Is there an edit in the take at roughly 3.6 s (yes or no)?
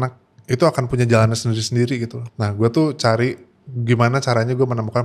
no